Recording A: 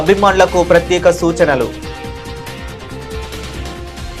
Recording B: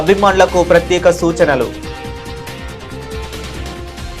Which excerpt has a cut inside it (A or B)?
B